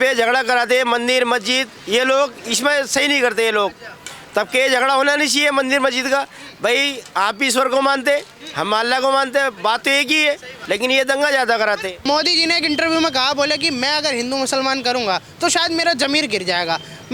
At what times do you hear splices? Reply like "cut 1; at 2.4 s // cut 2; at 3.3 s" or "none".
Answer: cut 1; at 10.5 s // cut 2; at 12.0 s